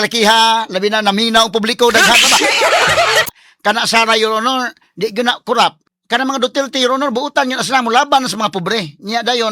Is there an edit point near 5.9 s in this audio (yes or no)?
yes